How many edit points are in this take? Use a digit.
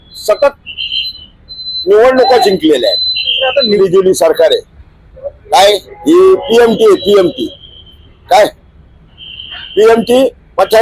1